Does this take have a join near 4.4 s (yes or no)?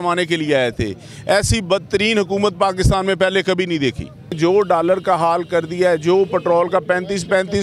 yes